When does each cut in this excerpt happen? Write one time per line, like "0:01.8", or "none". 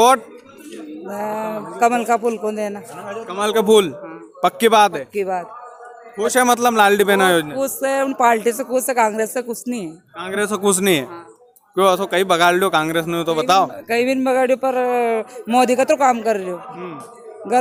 none